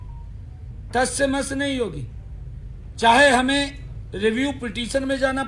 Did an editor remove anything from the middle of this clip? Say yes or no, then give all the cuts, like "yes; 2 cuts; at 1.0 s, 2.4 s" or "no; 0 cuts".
no; 0 cuts